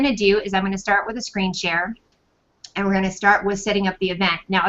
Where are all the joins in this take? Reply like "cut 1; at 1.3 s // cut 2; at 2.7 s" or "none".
cut 1; at 1.9 s